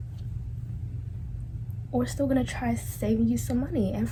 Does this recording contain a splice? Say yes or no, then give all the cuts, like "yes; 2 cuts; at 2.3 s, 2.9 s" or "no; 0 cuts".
no; 0 cuts